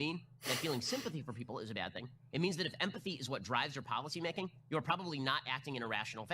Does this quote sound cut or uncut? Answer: cut